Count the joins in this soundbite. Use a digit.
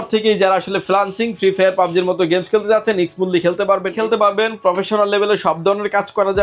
1